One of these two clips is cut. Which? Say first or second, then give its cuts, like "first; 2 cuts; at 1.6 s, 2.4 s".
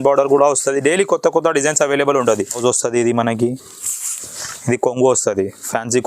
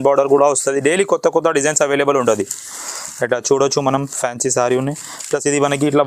first; 1 cut; at 2.6 s